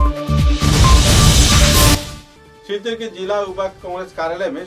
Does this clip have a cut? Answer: no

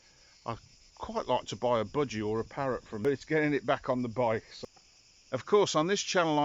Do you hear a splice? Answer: yes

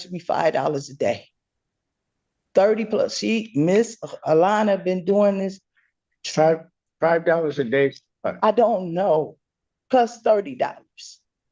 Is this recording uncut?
yes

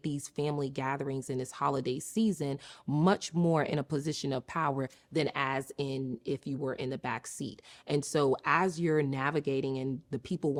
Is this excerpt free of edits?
yes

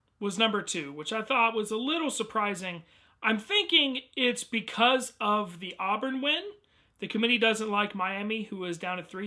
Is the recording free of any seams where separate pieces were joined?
yes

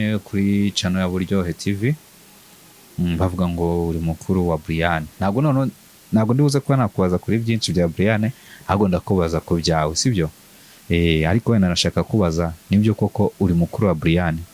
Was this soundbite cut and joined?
no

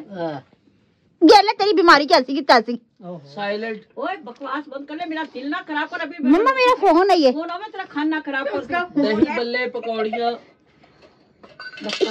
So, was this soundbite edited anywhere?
no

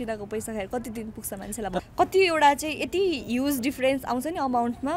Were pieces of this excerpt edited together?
yes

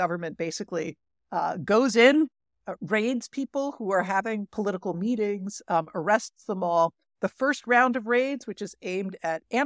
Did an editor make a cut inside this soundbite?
no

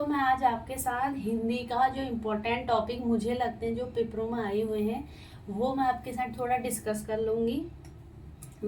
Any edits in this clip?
no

